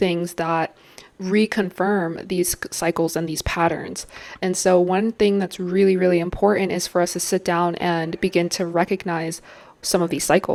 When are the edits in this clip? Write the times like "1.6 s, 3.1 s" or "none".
none